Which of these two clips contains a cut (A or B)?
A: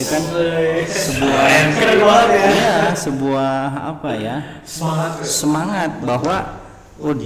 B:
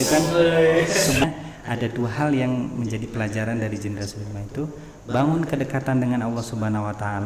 B